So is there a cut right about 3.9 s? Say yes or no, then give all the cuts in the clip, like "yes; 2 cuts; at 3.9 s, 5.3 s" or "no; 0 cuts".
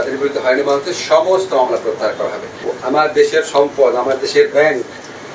no; 1 cut; at 2.7 s